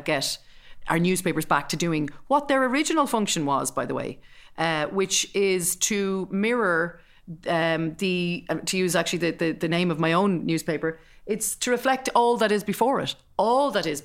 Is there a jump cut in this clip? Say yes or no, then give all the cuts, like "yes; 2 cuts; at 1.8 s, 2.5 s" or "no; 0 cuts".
no; 0 cuts